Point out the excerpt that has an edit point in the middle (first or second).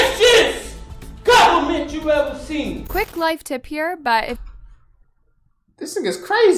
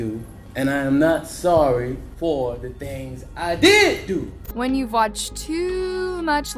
second